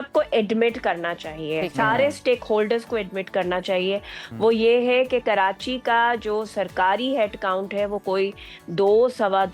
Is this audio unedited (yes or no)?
yes